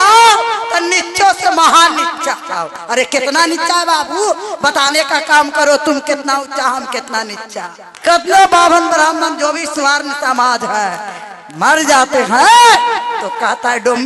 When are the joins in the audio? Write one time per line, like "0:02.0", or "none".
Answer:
0:07.8